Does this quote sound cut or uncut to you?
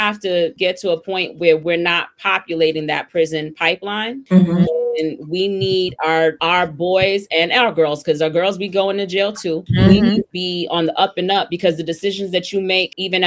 uncut